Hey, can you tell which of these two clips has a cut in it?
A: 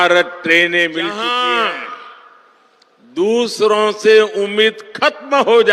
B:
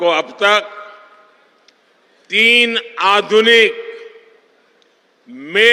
A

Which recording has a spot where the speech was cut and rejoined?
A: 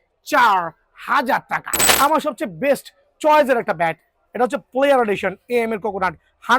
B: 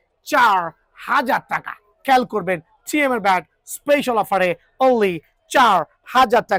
A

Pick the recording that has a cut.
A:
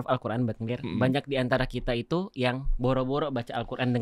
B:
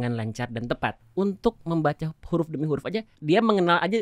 B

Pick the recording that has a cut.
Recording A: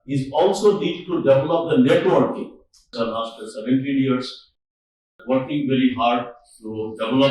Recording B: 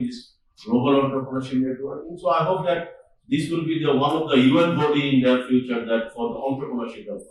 A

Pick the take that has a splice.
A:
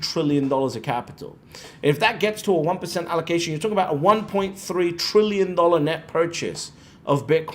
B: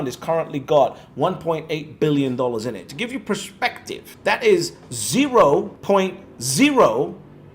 B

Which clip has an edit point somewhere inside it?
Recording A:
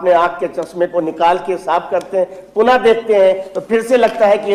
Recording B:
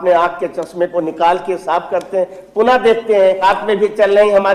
B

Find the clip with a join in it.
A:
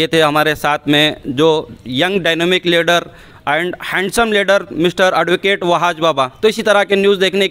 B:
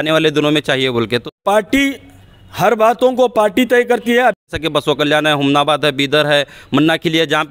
B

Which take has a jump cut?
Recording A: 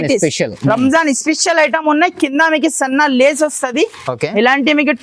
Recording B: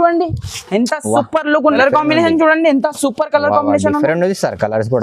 B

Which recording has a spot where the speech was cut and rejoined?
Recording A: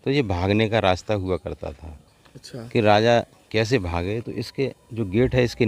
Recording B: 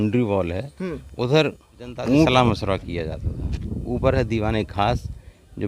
B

